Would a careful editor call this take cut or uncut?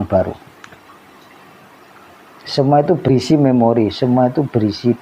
cut